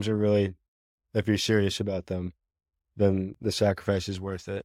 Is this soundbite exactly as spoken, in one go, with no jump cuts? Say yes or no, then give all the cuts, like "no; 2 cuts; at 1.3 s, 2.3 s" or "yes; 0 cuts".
yes; 0 cuts